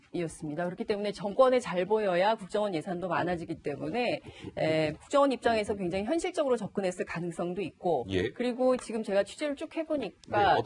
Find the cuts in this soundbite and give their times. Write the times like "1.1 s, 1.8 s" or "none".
8.4 s